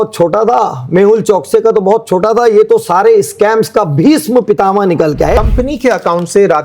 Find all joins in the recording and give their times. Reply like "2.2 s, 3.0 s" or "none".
5.4 s